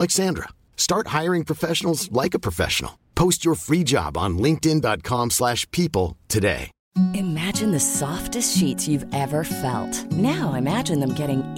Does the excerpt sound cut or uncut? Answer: cut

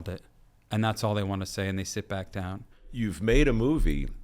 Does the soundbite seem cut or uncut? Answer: cut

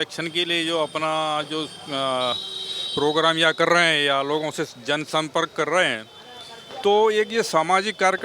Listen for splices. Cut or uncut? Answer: uncut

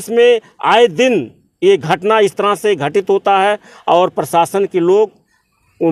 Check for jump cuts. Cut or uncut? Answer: uncut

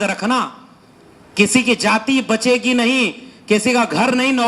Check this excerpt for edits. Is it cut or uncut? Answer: uncut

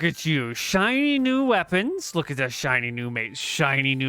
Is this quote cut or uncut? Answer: uncut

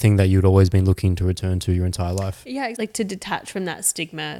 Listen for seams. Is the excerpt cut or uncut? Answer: cut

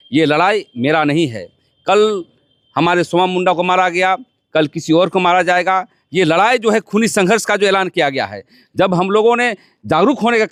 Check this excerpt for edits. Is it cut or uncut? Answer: uncut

